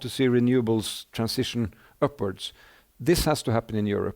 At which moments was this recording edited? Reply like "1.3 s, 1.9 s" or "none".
1.0 s